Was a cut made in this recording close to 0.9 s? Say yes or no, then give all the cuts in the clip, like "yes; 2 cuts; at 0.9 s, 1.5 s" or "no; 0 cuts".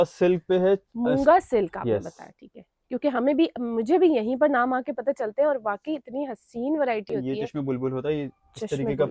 no; 1 cut; at 7.2 s